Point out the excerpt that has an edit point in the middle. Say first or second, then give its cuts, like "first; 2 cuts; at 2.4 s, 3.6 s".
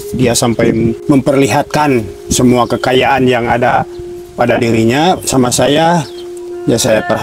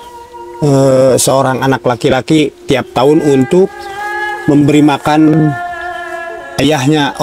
first; 1 cut; at 1.0 s